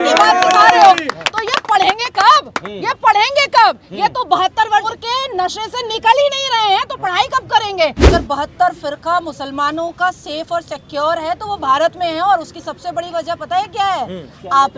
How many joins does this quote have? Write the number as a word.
one